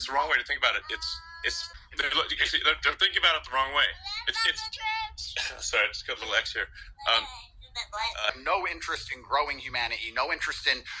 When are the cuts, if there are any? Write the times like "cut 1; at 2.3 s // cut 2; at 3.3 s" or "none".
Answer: cut 1; at 1.6 s // cut 2; at 8.3 s